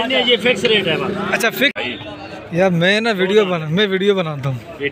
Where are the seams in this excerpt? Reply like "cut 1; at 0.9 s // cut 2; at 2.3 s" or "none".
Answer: cut 1; at 1.7 s